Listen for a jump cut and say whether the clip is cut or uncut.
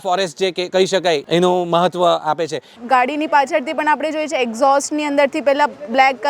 cut